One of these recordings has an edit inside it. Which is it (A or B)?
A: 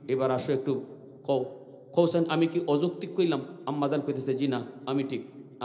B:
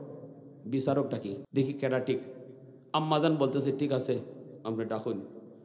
B